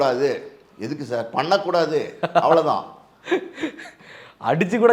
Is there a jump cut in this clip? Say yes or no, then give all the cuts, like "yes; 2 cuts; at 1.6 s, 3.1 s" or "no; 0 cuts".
no; 0 cuts